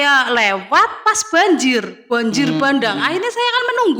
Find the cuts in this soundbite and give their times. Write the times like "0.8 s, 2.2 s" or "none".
none